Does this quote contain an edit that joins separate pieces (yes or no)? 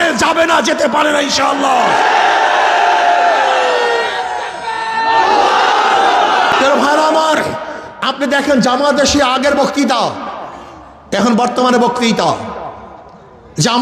yes